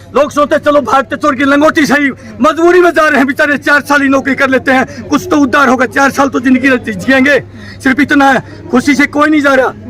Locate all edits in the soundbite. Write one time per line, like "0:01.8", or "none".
none

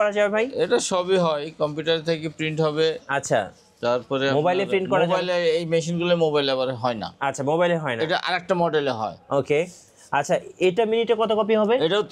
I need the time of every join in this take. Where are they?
none

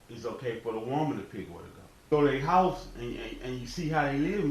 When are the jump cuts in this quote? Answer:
0:02.1

